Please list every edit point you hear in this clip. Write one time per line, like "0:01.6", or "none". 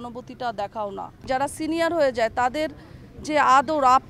0:01.2